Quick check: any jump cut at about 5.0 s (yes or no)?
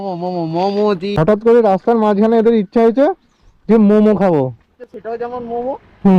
yes